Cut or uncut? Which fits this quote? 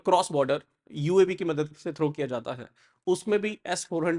uncut